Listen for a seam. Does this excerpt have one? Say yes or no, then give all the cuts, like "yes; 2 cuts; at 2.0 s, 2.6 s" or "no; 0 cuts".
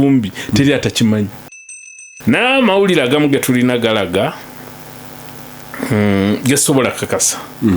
yes; 1 cut; at 1.5 s